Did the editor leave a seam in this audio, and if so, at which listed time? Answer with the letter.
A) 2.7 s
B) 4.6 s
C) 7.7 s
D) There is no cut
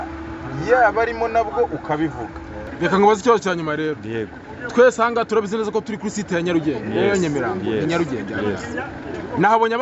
A